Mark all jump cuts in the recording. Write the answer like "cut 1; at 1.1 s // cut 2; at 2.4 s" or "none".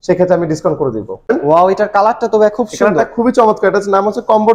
cut 1; at 1.3 s